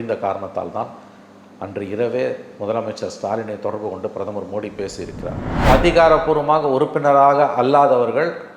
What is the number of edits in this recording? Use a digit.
1